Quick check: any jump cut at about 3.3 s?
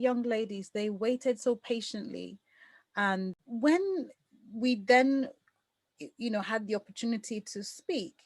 yes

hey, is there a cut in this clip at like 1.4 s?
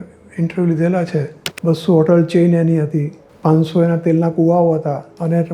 yes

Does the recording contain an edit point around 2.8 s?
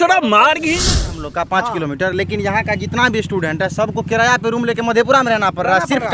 no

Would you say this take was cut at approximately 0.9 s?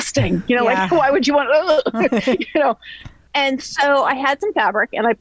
no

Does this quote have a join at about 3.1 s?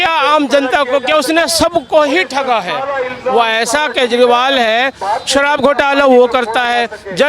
no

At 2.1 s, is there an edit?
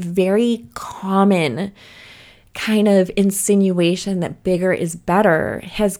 no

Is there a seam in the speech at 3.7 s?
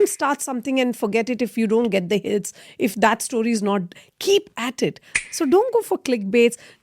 no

